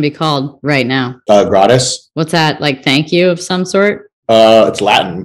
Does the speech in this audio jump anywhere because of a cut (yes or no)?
yes